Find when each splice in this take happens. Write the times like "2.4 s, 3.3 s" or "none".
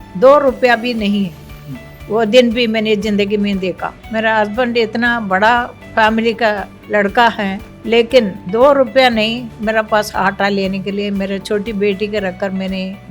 3.9 s, 5.8 s, 6.7 s, 7.7 s, 8.4 s